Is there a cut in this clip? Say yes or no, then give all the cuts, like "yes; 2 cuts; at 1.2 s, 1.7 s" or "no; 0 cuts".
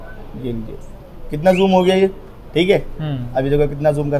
no; 0 cuts